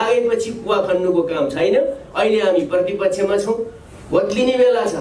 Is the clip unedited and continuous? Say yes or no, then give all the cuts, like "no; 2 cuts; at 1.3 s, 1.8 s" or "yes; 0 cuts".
yes; 0 cuts